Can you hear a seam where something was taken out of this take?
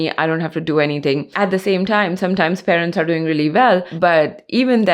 yes; 1 cut; at 1.3 s

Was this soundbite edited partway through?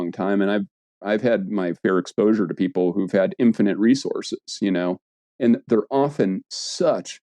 no; 0 cuts

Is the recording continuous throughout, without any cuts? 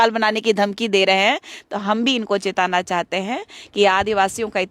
yes; 0 cuts

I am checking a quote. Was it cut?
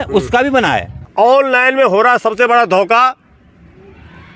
yes; 1 cut; at 1.0 s

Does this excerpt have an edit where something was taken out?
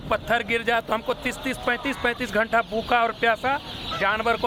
no; 0 cuts

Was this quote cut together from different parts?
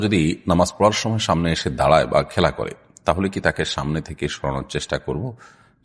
no; 0 cuts

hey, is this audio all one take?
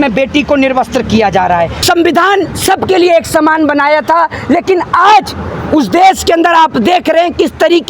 no; 1 cut; at 1.8 s

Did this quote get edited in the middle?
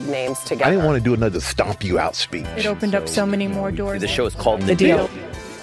no; 0 cuts

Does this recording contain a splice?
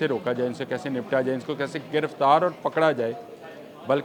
no; 0 cuts

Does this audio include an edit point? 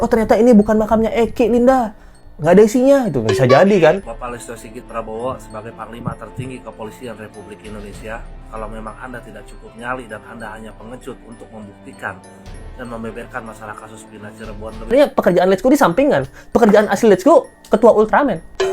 yes; 2 cuts; at 4.1 s, 14.9 s

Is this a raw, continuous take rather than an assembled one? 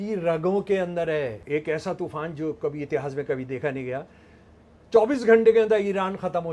no; 1 cut; at 1.4 s

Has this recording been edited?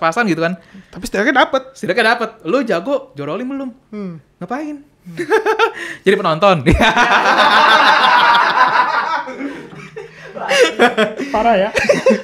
no; 0 cuts

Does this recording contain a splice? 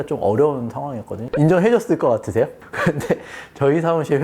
yes; 2 cuts; at 1.3 s, 2.7 s

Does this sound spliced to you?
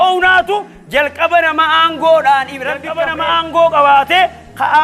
yes; 1 cut; at 2.9 s

